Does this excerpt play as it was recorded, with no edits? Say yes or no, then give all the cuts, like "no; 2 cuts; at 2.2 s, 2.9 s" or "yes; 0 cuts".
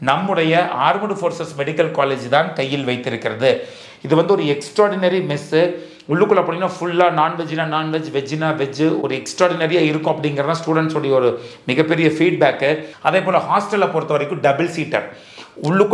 yes; 0 cuts